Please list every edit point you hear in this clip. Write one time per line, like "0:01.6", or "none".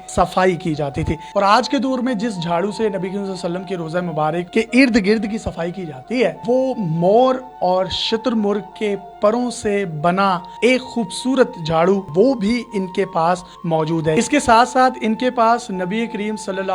0:01.2
0:04.5
0:06.4
0:12.1
0:14.2